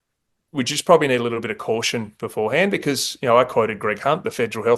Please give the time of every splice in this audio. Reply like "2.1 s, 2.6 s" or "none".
none